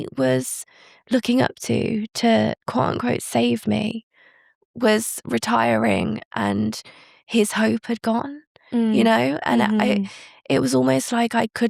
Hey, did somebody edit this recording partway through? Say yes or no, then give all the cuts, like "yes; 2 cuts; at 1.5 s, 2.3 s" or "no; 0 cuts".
no; 0 cuts